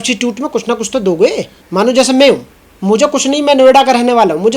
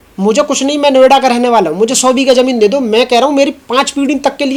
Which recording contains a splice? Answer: first; 1 cut; at 1.5 s

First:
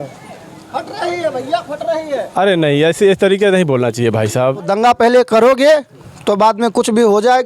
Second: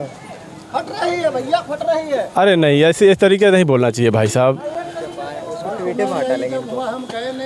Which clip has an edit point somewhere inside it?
first; 1 cut; at 4.7 s

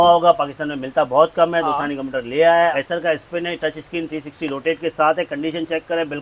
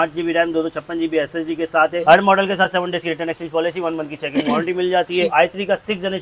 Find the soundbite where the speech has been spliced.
second; 2 cuts; at 2.0 s, 5.3 s

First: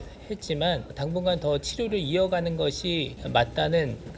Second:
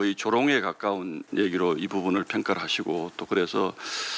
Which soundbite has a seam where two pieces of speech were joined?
first; 2 cuts; at 0.9 s, 3.2 s

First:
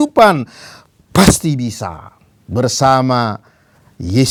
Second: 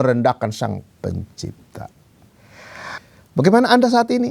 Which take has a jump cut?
second; 1 cut; at 3.0 s

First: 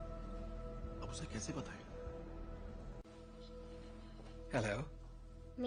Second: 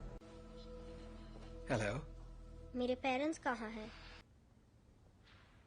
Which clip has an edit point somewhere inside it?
second; 1 cut; at 4.2 s

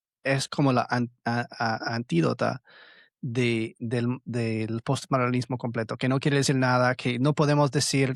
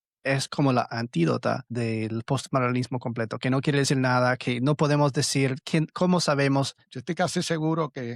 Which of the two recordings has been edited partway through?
second; 3 cuts; at 0.9 s, 1.7 s, 6.8 s

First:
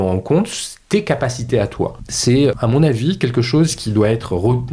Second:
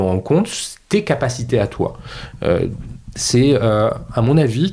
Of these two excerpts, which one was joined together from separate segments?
first; 1 cut; at 2.4 s

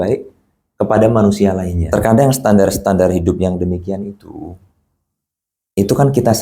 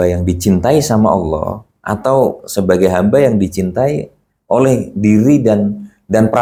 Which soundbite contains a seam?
first; 1 cut; at 1.8 s

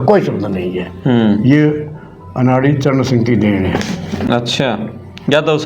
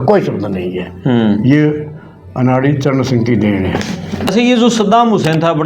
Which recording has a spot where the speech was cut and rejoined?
second; 1 cut; at 4.3 s

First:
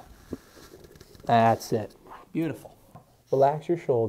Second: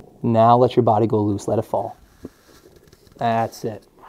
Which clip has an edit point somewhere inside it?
first; 1 cut; at 3.1 s

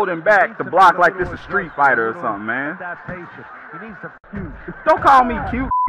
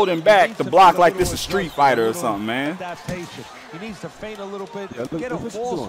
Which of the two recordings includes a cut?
first; 1 cut; at 4.2 s

